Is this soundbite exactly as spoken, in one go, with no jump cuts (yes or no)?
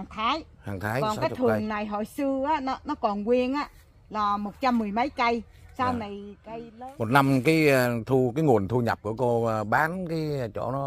no